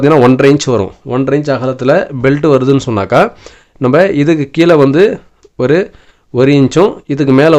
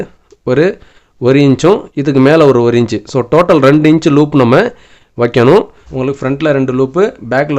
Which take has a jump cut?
second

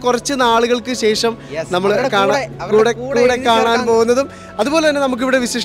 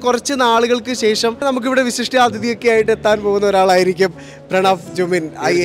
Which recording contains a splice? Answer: second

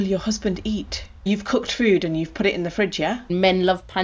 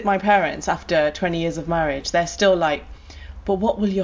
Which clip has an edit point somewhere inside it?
first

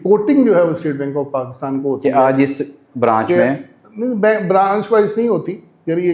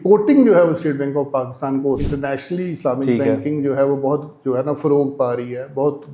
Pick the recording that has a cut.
second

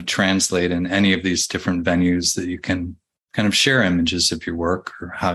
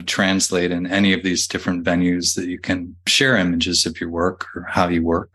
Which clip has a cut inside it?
second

